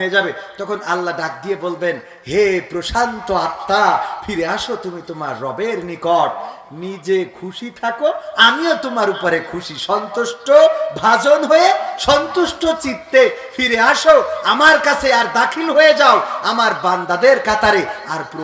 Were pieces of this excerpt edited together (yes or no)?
no